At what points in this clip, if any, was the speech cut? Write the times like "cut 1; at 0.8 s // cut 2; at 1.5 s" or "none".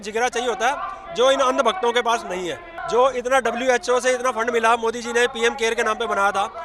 cut 1; at 2.7 s